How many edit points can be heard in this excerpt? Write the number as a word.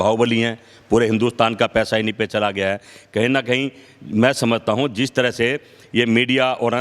zero